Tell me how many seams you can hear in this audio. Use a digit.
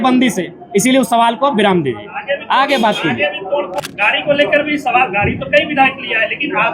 1